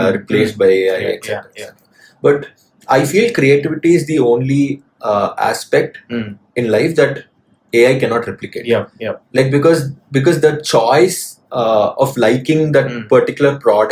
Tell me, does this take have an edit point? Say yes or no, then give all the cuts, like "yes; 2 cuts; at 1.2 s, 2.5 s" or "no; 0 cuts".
no; 0 cuts